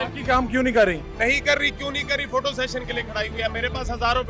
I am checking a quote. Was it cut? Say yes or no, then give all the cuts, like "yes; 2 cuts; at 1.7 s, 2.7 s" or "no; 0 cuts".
no; 0 cuts